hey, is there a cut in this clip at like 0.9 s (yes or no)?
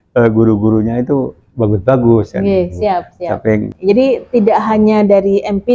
no